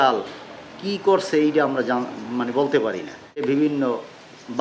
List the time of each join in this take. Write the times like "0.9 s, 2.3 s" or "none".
3.4 s